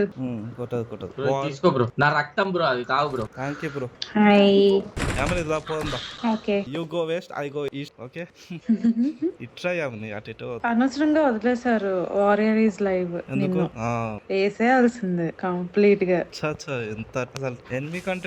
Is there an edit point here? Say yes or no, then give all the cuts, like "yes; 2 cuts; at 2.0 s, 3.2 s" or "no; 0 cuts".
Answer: yes; 6 cuts; at 1.9 s, 3.4 s, 5.0 s, 6.1 s, 10.6 s, 14.2 s